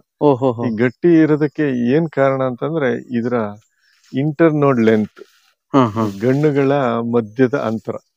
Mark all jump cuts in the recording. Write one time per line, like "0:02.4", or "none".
none